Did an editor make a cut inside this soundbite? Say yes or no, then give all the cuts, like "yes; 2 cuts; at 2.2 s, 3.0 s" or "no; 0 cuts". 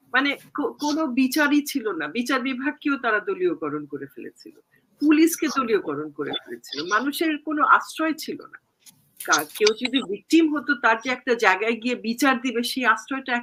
no; 0 cuts